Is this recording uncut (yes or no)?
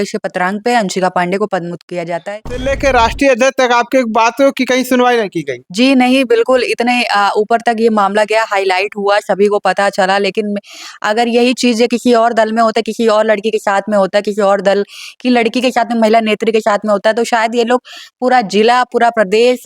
no